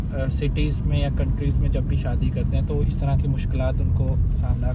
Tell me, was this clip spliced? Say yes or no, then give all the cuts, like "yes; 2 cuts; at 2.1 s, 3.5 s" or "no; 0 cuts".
no; 0 cuts